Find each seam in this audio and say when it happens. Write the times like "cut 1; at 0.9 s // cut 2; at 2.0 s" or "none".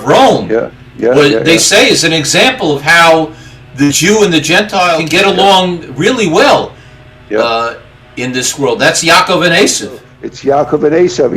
cut 1; at 5.0 s // cut 2; at 10.1 s